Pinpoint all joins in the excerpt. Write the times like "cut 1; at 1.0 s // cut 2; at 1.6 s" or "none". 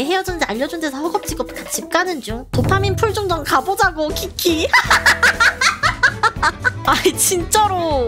none